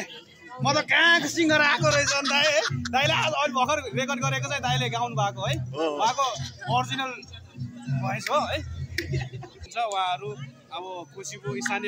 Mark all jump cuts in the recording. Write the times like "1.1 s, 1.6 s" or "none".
9.6 s